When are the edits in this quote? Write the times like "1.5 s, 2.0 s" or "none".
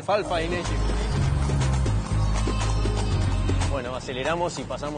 1.2 s